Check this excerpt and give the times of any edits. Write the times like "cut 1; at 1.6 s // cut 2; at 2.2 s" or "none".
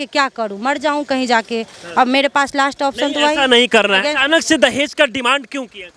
cut 1; at 4.0 s